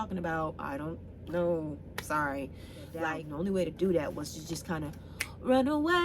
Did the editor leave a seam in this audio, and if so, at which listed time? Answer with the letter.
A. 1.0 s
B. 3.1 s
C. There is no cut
B